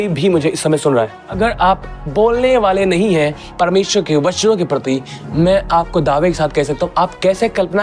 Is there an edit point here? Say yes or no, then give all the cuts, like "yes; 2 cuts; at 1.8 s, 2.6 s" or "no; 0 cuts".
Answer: yes; 1 cut; at 1.2 s